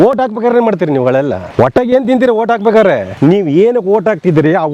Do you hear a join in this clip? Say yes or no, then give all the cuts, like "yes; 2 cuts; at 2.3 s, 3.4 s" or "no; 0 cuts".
yes; 2 cuts; at 1.4 s, 3.1 s